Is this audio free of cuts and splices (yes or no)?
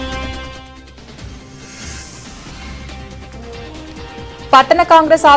no